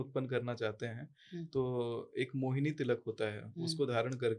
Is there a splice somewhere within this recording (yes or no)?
no